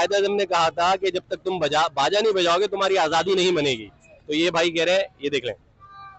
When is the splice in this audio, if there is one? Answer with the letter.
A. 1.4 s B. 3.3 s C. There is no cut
C